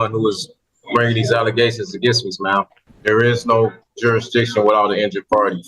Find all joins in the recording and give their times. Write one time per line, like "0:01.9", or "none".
0:02.8